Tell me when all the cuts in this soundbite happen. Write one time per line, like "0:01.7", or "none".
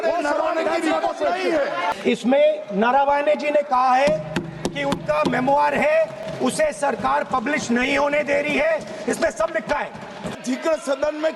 0:01.9
0:10.4